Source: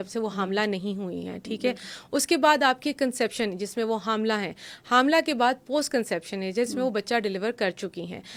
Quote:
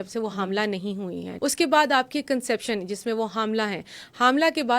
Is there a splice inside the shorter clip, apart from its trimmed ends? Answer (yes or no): yes